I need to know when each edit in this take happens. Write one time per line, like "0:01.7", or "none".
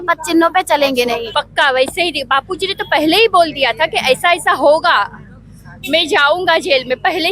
0:01.3

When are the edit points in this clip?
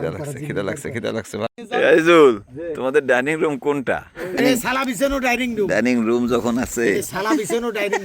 0:01.4
0:04.4

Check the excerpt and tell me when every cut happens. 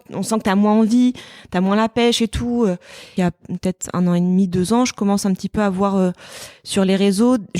0:03.1

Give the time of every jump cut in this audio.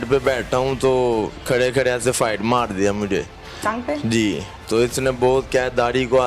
0:04.5

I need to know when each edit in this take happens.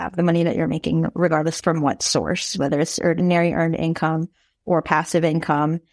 0:01.6
0:03.2

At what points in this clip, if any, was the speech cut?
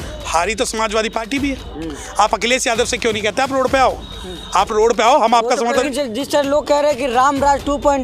0:05.9

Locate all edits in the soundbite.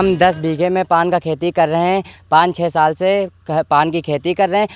0:02.2

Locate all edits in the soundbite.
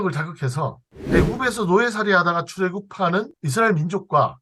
0:00.9
0:03.4

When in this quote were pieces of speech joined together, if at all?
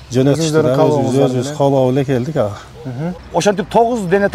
0:03.2

